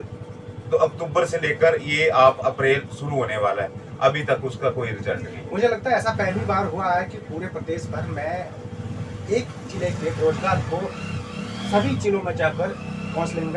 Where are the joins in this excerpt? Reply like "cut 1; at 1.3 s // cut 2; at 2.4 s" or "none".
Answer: none